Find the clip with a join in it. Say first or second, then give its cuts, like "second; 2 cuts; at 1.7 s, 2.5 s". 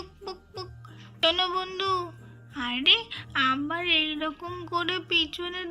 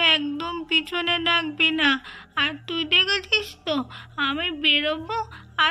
first; 1 cut; at 1.0 s